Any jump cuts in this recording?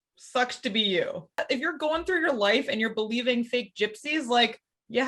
yes; 1 cut; at 1.4 s

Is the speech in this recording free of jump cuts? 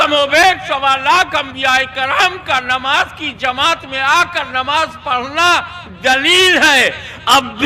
yes; 0 cuts

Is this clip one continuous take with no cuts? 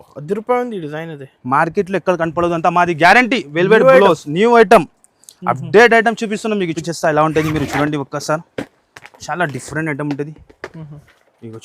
no; 1 cut; at 6.8 s

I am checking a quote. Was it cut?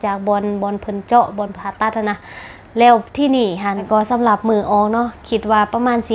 yes; 1 cut; at 3.8 s

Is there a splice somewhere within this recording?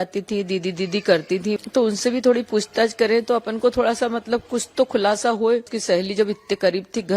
yes; 2 cuts; at 1.6 s, 5.7 s

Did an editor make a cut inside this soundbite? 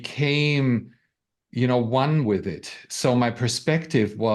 no; 0 cuts

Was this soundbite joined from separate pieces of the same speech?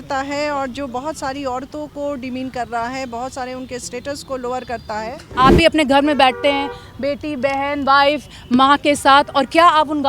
yes; 1 cut; at 5.4 s

